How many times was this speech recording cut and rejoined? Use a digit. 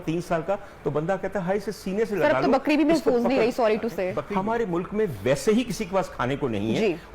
1